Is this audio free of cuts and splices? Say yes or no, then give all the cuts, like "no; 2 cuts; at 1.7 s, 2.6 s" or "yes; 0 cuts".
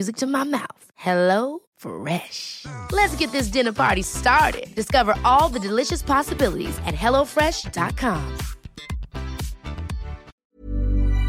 no; 1 cut; at 10.4 s